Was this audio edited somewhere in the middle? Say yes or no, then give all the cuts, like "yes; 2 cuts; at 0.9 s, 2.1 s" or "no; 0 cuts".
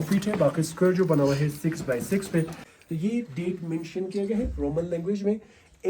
yes; 1 cut; at 2.6 s